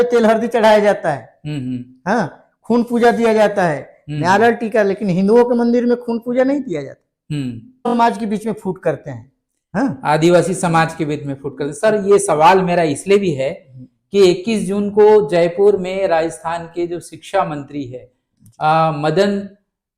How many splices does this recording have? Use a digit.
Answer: 1